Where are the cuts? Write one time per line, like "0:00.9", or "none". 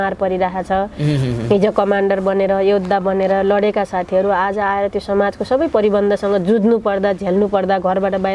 none